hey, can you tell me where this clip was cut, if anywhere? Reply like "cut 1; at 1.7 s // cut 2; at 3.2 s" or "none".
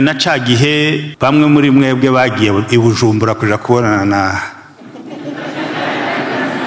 cut 1; at 1.1 s